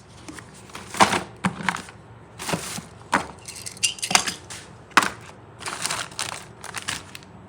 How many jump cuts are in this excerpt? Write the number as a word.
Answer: zero